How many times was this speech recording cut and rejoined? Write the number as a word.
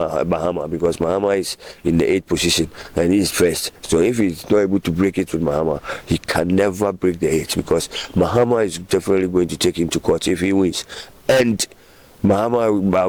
zero